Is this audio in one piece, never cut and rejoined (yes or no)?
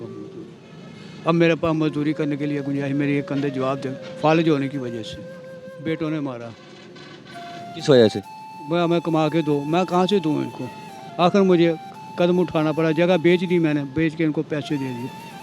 no